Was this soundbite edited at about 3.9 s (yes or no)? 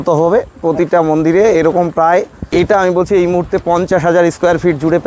no